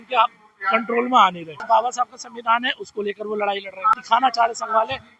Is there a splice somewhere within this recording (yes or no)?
yes